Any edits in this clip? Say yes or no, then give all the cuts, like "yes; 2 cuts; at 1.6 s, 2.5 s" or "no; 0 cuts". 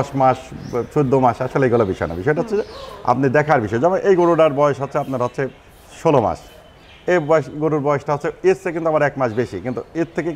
no; 0 cuts